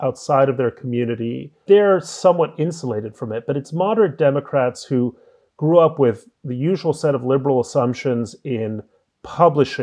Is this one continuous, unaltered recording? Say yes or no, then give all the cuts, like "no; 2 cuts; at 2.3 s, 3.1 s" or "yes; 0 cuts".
no; 1 cut; at 1.6 s